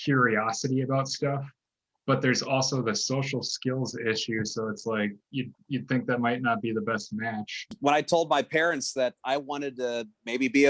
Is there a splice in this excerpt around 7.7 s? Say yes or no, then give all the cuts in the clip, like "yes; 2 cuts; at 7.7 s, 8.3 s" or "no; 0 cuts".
yes; 1 cut; at 7.7 s